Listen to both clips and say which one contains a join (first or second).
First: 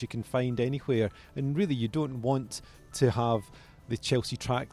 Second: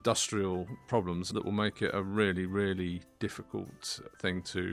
second